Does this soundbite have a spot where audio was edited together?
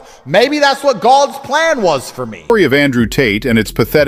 yes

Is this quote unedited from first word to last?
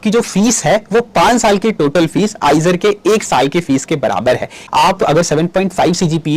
no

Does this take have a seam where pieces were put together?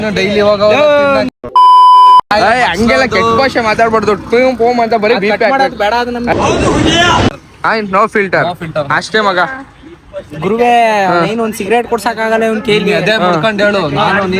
no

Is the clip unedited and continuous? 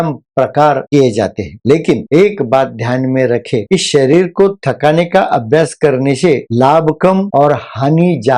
yes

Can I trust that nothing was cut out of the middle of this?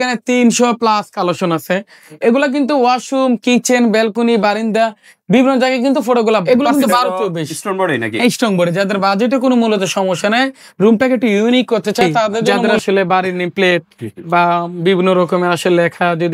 no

